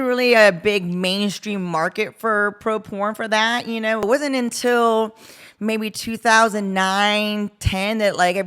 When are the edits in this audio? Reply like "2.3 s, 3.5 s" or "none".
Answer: 4.0 s